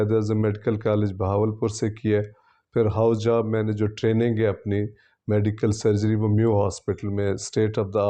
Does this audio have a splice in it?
no; 0 cuts

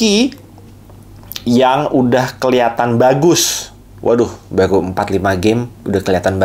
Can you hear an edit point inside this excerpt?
no; 0 cuts

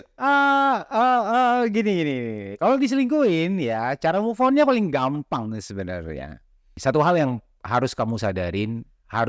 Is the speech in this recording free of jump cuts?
no; 1 cut; at 6.7 s

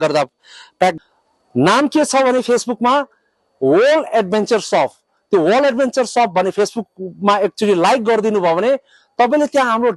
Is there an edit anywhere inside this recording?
yes; 1 cut; at 0.9 s

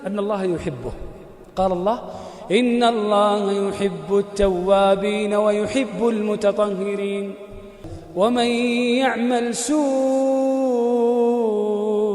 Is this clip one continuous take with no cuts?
no; 1 cut; at 7.9 s

